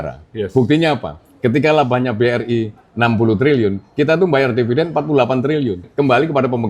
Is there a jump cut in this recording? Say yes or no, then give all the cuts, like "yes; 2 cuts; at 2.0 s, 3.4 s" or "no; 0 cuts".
no; 0 cuts